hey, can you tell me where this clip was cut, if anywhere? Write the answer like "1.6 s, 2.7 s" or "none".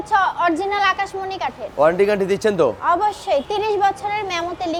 none